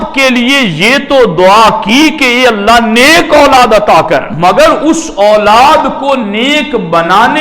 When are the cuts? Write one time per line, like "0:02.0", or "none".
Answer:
0:04.3